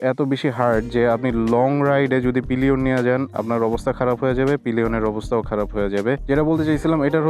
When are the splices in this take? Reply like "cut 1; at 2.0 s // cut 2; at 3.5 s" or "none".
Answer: cut 1; at 6.2 s